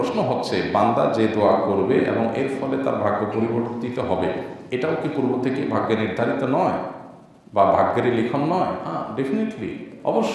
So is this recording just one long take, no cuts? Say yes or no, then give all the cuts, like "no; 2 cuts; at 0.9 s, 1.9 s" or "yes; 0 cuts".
yes; 0 cuts